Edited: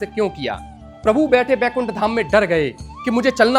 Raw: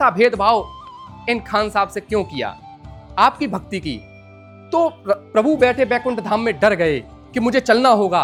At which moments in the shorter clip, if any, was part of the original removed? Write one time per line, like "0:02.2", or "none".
0:01.0